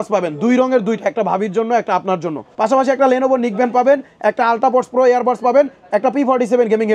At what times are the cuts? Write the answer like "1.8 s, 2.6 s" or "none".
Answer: 2.4 s